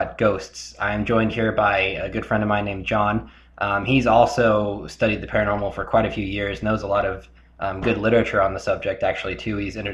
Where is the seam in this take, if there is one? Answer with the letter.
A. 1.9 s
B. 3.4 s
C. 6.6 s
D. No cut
D